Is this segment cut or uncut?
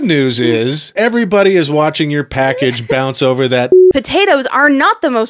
cut